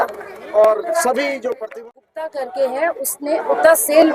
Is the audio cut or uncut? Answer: cut